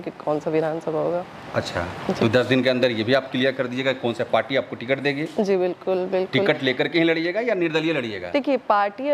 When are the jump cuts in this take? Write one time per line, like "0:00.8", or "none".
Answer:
none